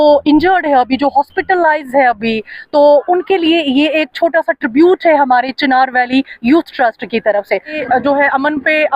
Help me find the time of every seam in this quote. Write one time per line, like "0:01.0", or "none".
0:07.8